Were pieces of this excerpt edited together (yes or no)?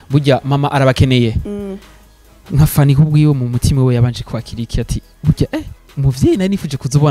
no